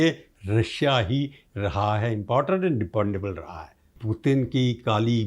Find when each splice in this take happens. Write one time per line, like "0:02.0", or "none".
0:04.0